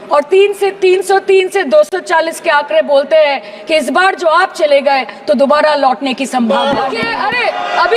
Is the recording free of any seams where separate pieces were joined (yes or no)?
no